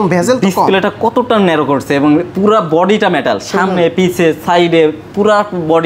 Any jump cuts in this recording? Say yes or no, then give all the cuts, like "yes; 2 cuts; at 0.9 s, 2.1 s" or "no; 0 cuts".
no; 0 cuts